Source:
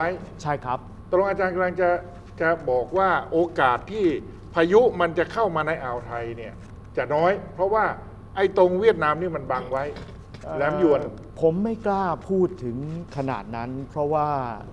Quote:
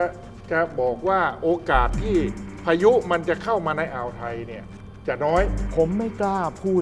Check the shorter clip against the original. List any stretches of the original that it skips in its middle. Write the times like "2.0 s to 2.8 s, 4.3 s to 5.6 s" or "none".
7.5 s to 11.2 s